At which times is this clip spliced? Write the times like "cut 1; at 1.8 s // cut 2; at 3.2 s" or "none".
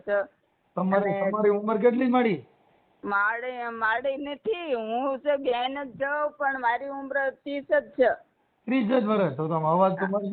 none